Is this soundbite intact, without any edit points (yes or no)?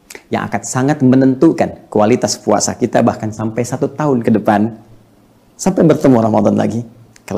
yes